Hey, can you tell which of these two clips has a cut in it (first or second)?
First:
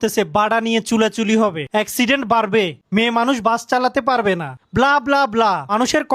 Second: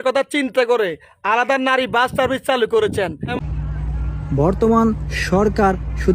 second